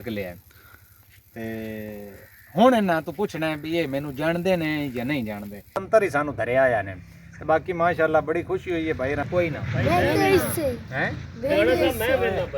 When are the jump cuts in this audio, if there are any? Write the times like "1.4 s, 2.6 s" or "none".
5.8 s, 9.3 s